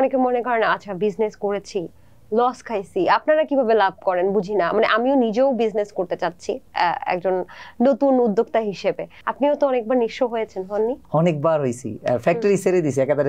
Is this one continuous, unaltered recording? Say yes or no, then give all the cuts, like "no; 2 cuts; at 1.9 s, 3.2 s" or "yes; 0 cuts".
yes; 0 cuts